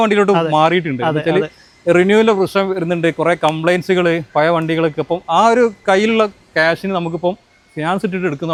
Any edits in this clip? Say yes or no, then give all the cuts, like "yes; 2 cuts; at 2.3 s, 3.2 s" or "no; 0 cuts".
no; 0 cuts